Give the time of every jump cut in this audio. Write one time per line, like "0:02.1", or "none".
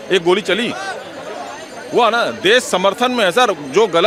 none